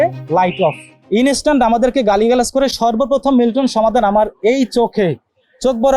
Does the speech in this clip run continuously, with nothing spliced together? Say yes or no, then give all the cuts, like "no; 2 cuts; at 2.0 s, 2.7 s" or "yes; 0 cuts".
no; 1 cut; at 0.9 s